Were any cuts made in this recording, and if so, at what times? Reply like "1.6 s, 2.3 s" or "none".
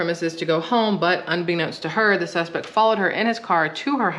none